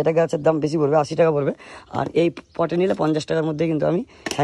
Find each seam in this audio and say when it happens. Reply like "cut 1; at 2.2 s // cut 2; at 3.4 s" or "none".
none